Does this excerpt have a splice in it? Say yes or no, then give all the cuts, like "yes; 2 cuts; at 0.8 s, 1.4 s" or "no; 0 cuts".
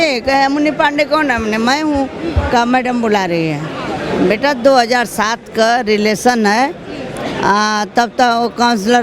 no; 0 cuts